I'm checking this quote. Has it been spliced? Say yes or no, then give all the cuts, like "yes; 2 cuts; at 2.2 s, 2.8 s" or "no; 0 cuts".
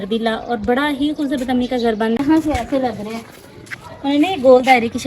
yes; 1 cut; at 2.2 s